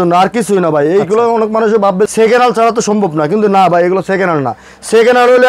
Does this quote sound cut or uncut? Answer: cut